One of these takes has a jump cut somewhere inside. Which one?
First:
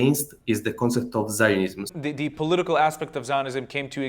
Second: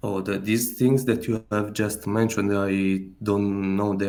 first; 1 cut; at 1.9 s

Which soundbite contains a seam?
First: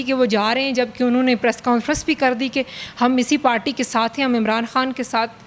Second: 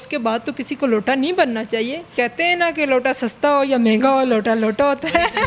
second; 1 cut; at 2.0 s

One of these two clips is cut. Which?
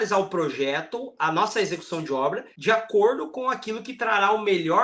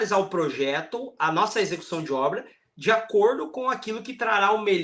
first; 1 cut; at 2.5 s

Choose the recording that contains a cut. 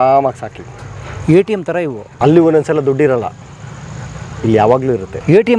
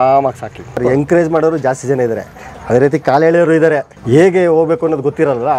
second; 2 cuts; at 0.8 s, 3.9 s

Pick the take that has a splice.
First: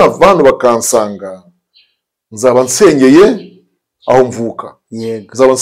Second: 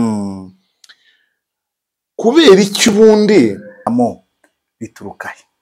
second; 1 cut; at 3.7 s

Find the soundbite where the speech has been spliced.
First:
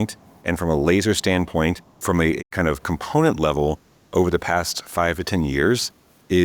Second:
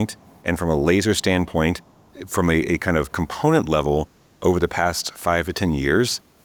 first; 1 cut; at 1.9 s

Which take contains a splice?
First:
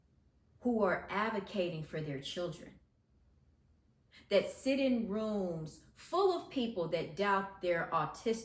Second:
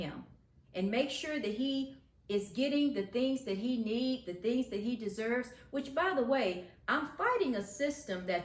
first; 1 cut; at 3.0 s

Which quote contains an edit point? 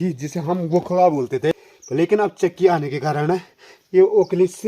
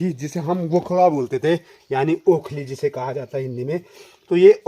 first; 1 cut; at 1.7 s

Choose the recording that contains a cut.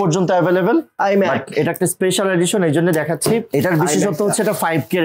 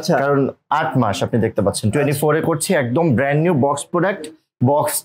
first; 1 cut; at 3.5 s

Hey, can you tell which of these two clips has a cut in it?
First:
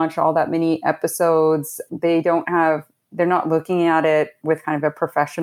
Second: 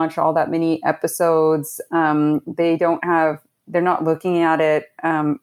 first; 2 cuts; at 1.9 s, 4.4 s

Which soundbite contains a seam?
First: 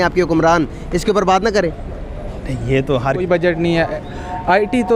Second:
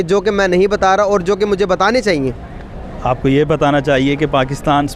first; 1 cut; at 3.0 s

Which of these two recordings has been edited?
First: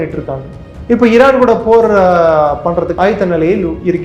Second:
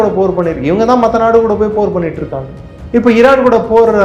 first; 1 cut; at 3.0 s

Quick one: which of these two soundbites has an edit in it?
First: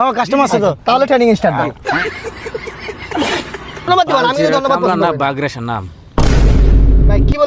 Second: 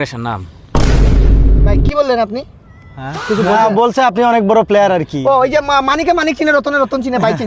first; 1 cut; at 3.9 s

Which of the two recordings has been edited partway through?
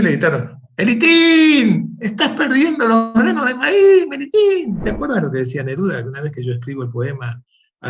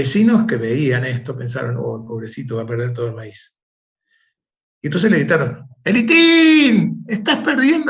first; 1 cut; at 4.8 s

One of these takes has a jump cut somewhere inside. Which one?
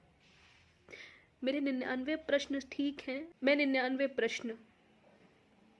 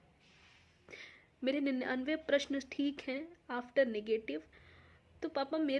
first; 1 cut; at 3.3 s

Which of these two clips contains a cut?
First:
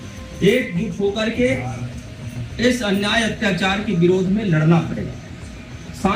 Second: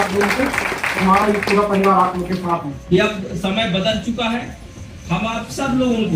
second; 1 cut; at 2.7 s

